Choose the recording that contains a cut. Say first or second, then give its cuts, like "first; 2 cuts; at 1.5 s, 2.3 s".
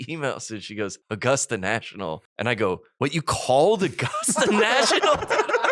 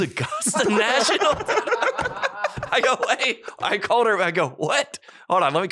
first; 3 cuts; at 1.0 s, 2.3 s, 2.9 s